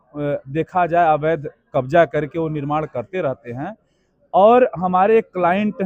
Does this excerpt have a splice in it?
no; 0 cuts

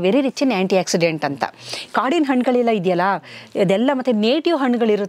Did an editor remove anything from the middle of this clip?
no; 0 cuts

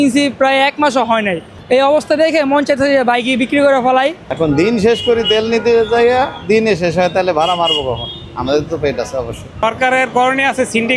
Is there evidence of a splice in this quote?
yes; 3 cuts; at 1.6 s, 4.2 s, 9.5 s

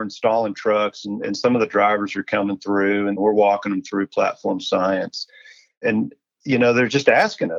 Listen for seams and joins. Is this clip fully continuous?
no; 2 cuts; at 3.2 s, 5.8 s

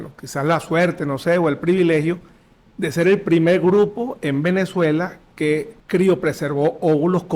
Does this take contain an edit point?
yes; 1 cut; at 5.8 s

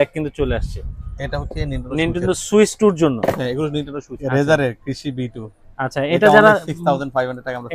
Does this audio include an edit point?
yes; 1 cut; at 4.2 s

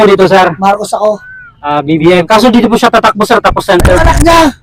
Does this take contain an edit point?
no; 0 cuts

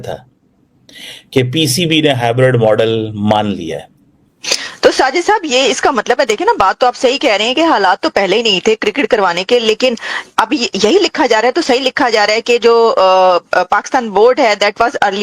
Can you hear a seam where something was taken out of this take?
yes; 1 cut; at 4.6 s

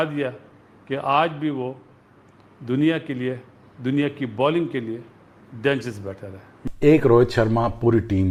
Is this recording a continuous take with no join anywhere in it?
yes; 0 cuts

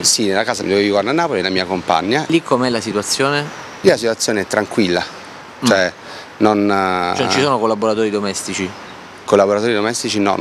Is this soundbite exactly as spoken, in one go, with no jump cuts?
yes; 0 cuts

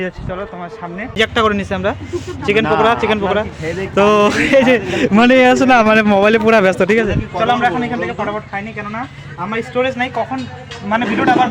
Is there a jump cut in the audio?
yes; 1 cut; at 1.2 s

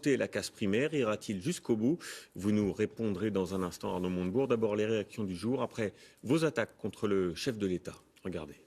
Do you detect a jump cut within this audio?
no; 0 cuts

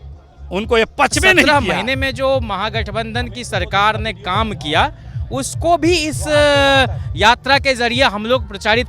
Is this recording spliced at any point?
yes; 1 cut; at 1.5 s

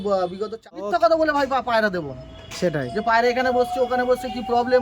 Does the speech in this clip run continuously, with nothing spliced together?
no; 1 cut; at 0.9 s

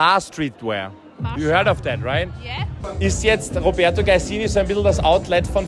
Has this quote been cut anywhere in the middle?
yes; 1 cut; at 2.8 s

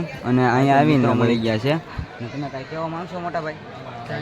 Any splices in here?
yes; 1 cut; at 1.2 s

